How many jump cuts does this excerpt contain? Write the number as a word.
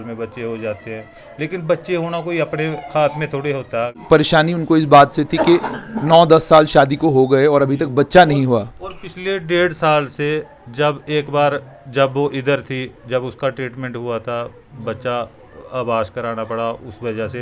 one